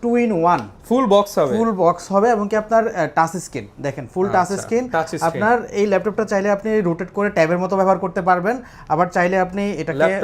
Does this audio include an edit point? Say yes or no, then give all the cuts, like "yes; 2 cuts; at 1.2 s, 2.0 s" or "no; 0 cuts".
no; 0 cuts